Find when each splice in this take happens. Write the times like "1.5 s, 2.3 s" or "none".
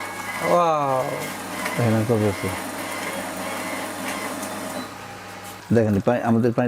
5.5 s

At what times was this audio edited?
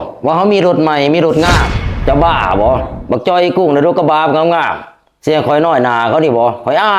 1.8 s

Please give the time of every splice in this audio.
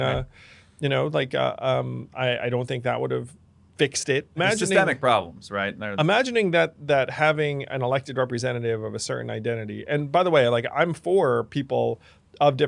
4.4 s, 5.8 s

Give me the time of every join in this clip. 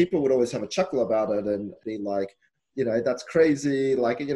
1.8 s

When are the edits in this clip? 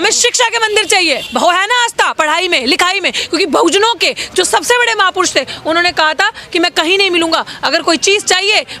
1.2 s

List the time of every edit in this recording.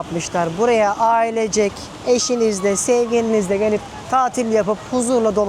none

